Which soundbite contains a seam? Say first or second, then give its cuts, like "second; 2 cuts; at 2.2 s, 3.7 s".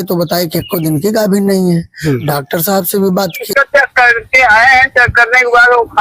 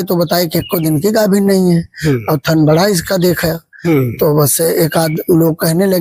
first; 2 cuts; at 2.3 s, 3.4 s